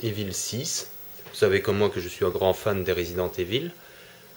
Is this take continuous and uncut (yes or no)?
no